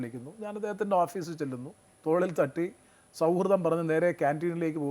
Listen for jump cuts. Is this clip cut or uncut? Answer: cut